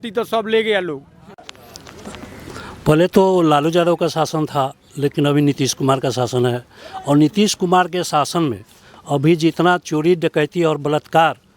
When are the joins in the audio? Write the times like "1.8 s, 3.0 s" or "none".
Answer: 1.5 s

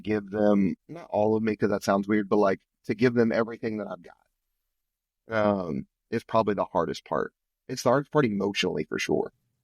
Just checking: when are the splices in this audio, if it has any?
0.9 s

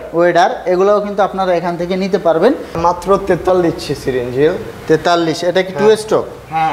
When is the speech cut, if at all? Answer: 2.8 s

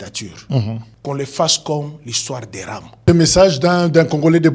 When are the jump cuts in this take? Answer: 0.9 s, 3.0 s

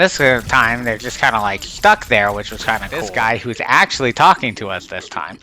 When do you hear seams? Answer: 3.1 s

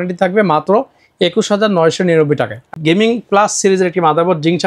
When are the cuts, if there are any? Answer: 2.8 s

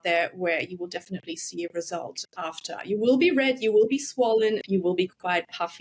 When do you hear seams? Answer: 4.6 s

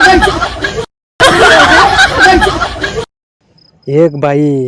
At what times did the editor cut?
1.2 s, 3.2 s

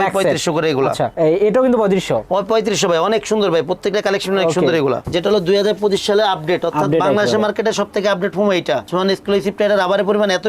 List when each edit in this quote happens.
5.0 s, 8.9 s

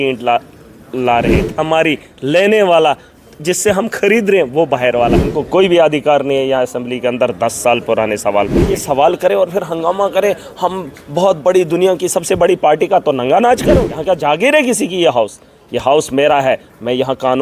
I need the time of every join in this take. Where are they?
1.5 s, 5.3 s, 8.8 s, 13.9 s

